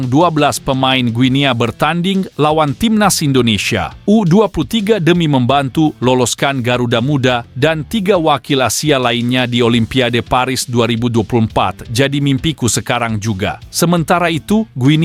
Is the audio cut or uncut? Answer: uncut